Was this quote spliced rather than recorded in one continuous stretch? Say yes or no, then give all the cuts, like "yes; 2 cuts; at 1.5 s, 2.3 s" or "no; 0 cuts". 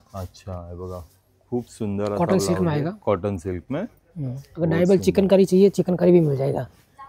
no; 0 cuts